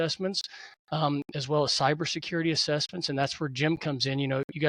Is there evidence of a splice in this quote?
no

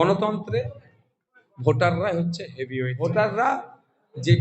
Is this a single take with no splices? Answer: no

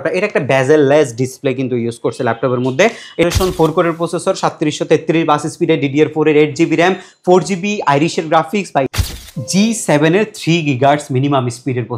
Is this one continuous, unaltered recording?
no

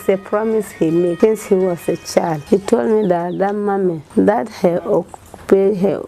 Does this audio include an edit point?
yes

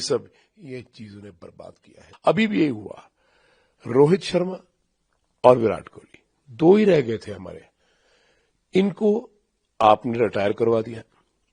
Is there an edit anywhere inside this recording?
yes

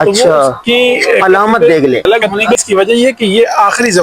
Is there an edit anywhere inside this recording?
yes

